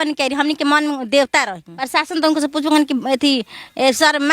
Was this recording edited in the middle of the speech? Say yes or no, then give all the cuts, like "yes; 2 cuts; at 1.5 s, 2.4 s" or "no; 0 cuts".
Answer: yes; 1 cut; at 1.9 s